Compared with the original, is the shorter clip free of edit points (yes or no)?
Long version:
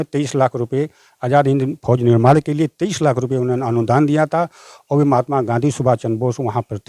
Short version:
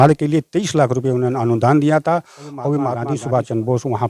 no